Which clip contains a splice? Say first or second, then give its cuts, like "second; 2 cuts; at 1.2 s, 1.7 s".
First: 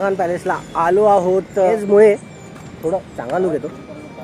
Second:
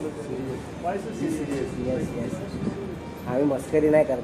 first; 1 cut; at 1.7 s